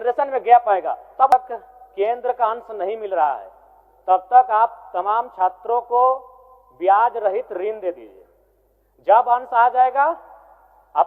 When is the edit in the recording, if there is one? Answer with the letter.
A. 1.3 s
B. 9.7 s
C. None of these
A